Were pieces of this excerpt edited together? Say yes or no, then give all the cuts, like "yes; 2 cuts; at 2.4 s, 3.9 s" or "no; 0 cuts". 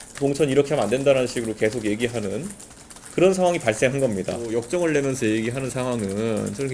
yes; 1 cut; at 4.5 s